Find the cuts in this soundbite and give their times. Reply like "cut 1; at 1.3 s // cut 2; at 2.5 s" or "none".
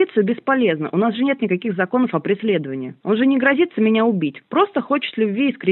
none